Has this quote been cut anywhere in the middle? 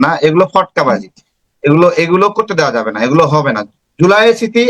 no; 0 cuts

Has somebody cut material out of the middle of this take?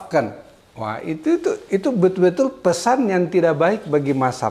no; 0 cuts

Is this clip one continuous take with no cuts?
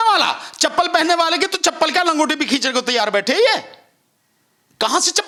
yes; 0 cuts

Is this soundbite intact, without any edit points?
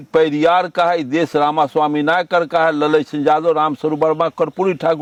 yes; 0 cuts

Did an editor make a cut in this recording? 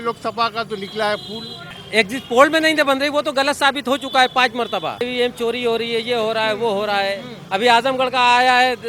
yes; 2 cuts; at 1.8 s, 5.1 s

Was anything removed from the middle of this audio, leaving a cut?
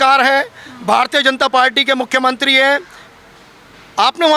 no; 0 cuts

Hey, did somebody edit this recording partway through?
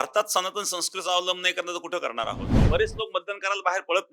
yes; 1 cut; at 2.5 s

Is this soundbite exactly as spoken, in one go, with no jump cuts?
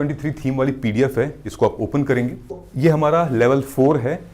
no; 1 cut; at 2.6 s

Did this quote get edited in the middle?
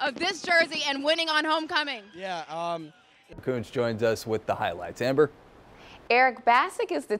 yes; 1 cut; at 3.4 s

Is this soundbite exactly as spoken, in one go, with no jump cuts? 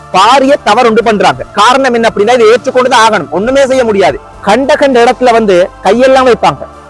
no; 1 cut; at 4.3 s

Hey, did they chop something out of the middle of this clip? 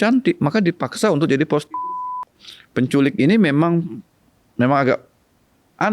yes; 1 cut; at 2.3 s

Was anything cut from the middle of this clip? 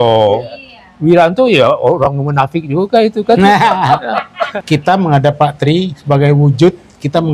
yes; 1 cut; at 4.5 s

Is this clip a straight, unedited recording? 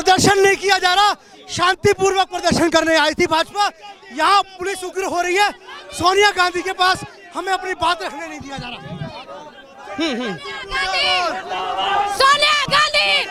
yes; 0 cuts

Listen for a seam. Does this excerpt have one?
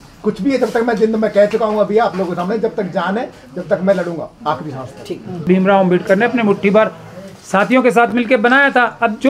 yes; 1 cut; at 5.5 s

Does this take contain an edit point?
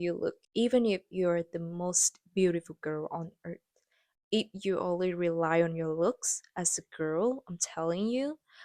no; 0 cuts

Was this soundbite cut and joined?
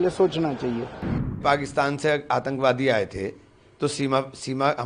yes; 1 cut; at 1.4 s

